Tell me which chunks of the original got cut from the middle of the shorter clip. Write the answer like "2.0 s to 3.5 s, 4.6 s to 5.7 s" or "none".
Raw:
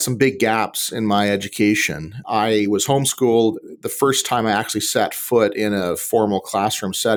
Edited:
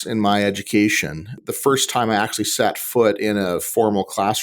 2.2 s to 3.7 s